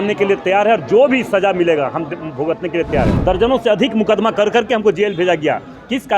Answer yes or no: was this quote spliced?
yes